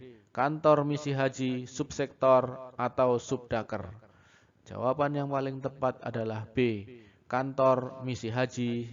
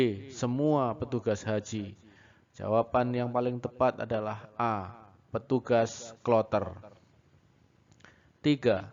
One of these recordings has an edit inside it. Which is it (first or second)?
first